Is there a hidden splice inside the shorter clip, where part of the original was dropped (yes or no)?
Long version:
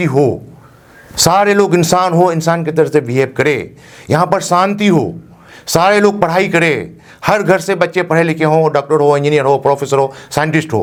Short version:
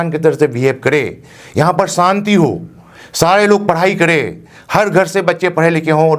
no